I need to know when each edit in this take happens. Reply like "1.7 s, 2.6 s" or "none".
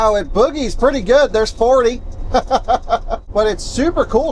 3.2 s